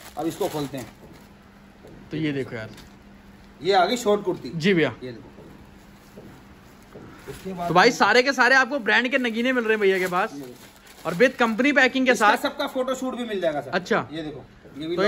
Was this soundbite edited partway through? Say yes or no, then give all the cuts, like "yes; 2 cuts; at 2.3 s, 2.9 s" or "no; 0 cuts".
no; 0 cuts